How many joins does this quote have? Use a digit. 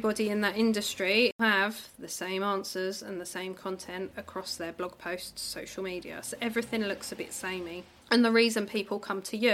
2